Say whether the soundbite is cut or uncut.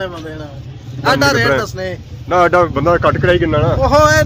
uncut